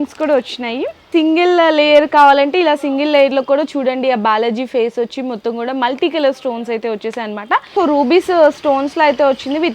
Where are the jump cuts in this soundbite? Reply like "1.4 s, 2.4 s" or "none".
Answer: 1.0 s, 7.7 s